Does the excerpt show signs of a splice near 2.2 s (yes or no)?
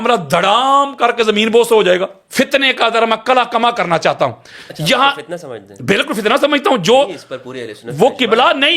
yes